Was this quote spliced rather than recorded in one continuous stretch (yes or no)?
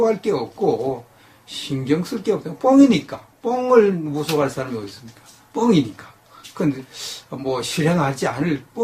yes